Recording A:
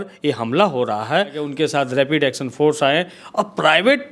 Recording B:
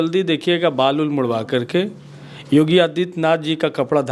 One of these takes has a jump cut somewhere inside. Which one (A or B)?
A